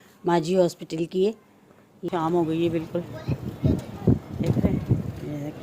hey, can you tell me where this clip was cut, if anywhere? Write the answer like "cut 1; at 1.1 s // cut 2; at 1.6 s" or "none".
cut 1; at 1.9 s

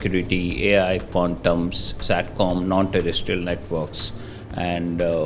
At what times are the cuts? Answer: none

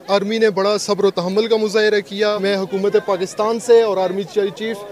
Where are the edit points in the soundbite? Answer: cut 1; at 2.4 s

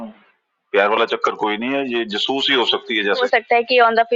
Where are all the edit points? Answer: cut 1; at 3.2 s

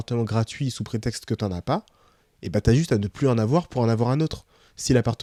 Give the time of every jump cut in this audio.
none

